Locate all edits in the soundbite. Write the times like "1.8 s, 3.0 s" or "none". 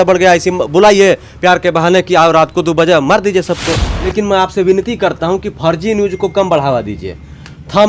3.9 s